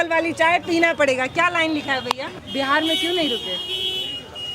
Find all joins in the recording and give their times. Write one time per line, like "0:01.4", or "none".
0:02.3